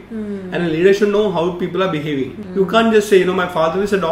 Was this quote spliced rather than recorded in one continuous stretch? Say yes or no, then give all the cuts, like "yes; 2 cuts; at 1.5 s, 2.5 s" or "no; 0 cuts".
yes; 1 cut; at 2.4 s